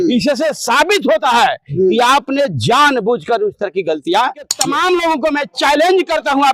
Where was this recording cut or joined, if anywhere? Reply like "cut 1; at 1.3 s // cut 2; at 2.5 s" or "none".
cut 1; at 4.6 s